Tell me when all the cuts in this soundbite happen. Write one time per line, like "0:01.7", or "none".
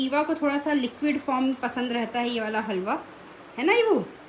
none